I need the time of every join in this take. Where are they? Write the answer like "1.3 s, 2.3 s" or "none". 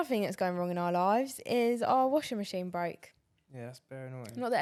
none